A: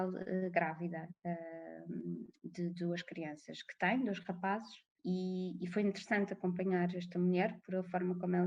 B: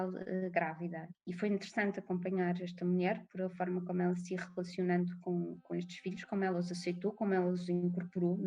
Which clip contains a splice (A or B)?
B